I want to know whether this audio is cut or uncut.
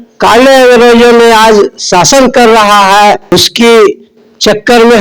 cut